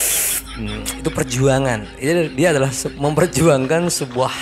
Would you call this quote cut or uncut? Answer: uncut